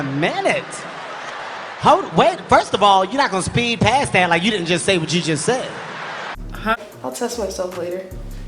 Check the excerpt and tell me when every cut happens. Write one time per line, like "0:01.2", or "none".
0:06.8

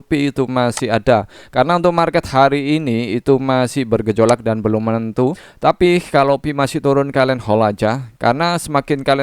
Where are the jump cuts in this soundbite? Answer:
0:05.5

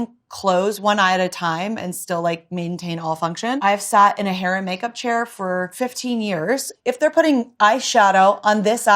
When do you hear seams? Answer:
0:03.6

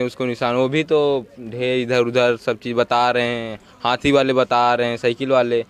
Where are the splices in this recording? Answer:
none

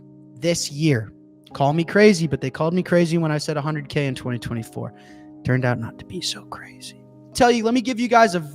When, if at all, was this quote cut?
0:07.4

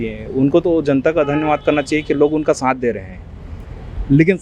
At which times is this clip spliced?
none

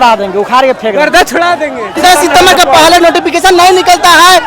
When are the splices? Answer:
0:02.0

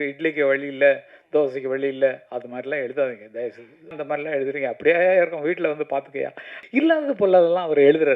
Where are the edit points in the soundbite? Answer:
0:04.0
0:06.6

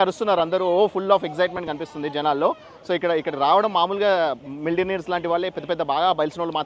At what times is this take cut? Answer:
none

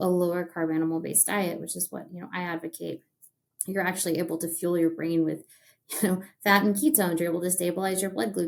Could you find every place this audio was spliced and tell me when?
none

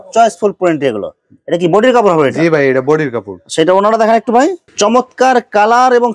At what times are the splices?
none

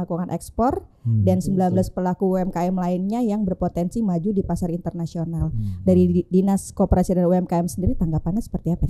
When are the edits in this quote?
none

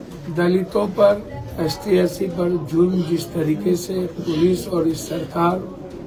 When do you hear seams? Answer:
none

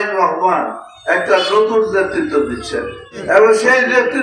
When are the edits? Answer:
none

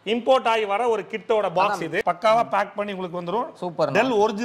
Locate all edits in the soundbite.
0:02.0

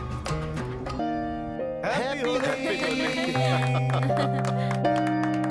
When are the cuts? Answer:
0:01.0

